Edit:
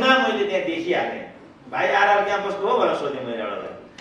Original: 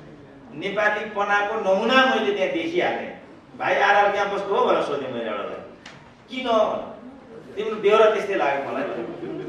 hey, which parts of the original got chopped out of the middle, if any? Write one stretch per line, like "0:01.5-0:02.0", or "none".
none